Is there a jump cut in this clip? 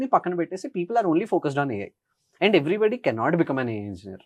no; 0 cuts

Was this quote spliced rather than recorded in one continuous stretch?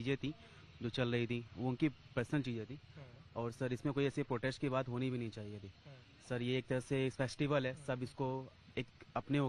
no; 0 cuts

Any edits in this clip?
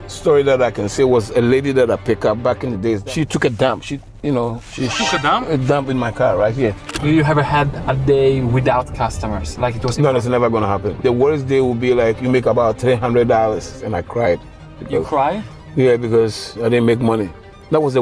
yes; 4 cuts; at 3.1 s, 6.9 s, 11.0 s, 13.7 s

